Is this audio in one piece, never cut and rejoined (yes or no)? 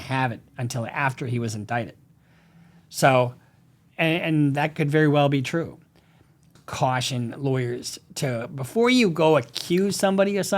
no